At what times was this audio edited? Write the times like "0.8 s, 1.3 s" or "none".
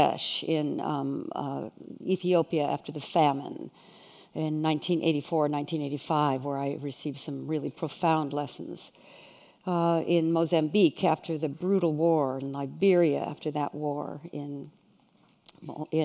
none